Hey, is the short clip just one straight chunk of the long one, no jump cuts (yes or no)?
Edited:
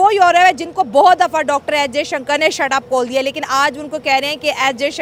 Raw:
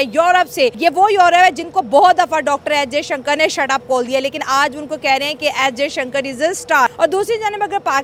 yes